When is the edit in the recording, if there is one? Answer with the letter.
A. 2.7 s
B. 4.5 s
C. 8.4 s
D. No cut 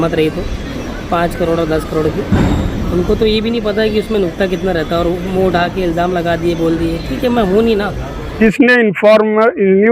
C